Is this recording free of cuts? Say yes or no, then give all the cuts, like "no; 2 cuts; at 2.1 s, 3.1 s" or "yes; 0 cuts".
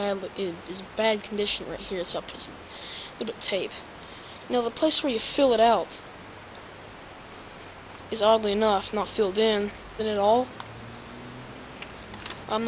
yes; 0 cuts